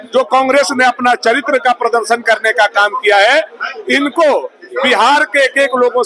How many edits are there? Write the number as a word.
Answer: zero